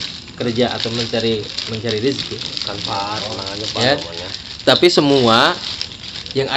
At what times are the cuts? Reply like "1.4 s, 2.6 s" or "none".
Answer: none